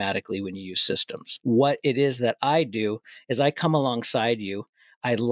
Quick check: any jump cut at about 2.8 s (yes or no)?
no